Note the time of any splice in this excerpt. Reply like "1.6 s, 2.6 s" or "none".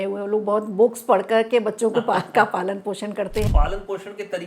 3.5 s